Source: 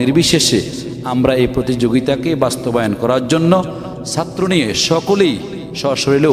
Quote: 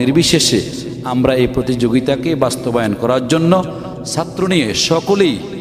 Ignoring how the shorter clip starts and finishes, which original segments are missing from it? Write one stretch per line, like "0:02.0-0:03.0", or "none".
none